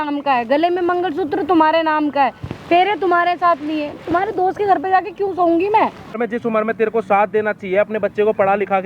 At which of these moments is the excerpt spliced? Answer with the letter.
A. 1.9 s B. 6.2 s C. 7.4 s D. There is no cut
B